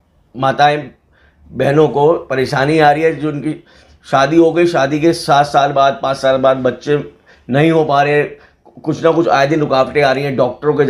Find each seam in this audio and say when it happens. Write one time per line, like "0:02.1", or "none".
none